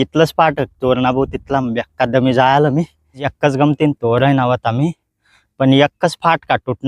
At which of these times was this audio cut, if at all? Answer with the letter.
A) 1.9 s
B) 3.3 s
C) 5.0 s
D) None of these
B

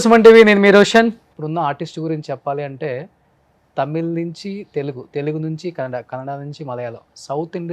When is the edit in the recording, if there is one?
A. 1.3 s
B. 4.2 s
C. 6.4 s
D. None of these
A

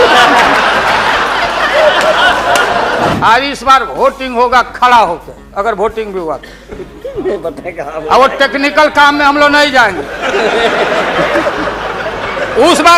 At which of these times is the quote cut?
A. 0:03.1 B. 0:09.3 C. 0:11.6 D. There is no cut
A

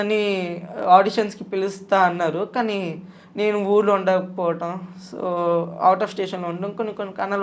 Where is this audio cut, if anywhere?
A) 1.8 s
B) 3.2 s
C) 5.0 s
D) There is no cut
D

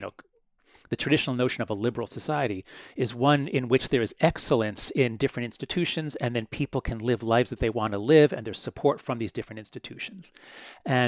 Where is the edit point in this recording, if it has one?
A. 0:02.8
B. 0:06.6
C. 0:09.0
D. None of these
D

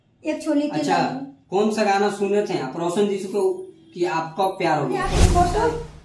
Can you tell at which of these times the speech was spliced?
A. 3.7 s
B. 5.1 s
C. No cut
B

